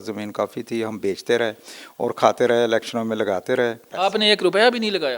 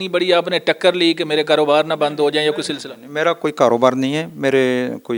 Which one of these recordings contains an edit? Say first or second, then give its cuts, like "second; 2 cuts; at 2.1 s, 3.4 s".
first; 1 cut; at 3.9 s